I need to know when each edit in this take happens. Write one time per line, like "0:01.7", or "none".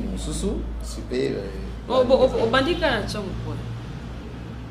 none